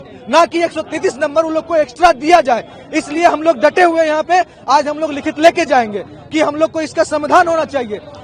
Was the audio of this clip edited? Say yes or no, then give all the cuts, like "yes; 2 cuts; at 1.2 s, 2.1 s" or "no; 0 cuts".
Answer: no; 0 cuts